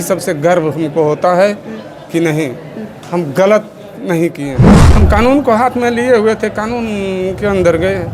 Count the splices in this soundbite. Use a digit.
1